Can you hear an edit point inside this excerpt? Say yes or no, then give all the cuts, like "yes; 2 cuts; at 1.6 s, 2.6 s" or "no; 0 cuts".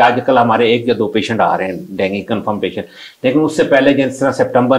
no; 0 cuts